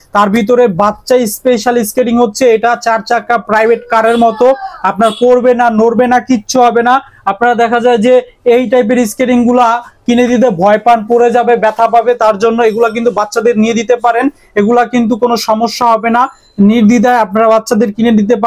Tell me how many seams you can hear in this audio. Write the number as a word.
zero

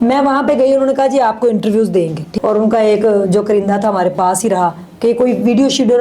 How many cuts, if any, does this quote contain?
one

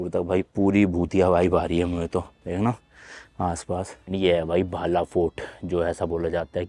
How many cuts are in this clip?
one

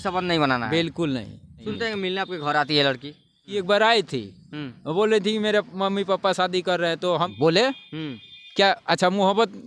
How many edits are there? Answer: three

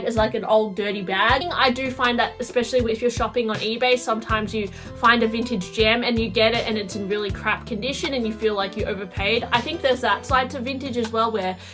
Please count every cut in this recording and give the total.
one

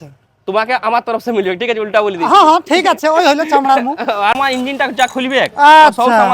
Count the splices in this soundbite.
one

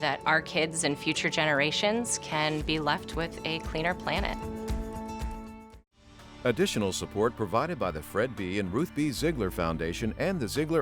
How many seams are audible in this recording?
one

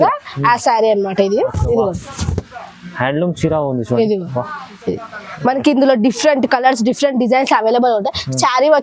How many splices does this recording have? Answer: zero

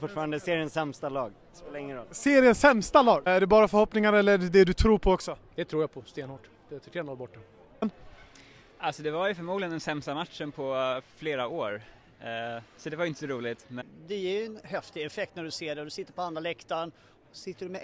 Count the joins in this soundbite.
three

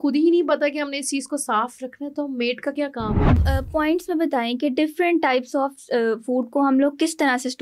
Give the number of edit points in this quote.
one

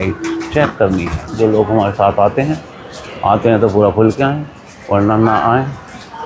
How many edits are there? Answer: one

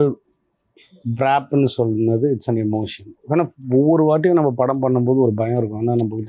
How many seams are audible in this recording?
zero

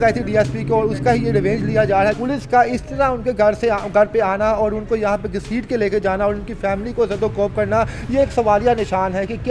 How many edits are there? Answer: one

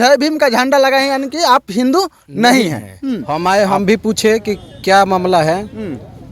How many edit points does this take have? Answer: one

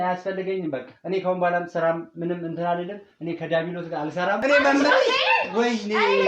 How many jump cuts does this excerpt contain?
one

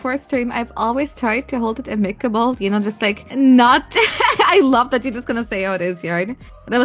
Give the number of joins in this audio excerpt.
one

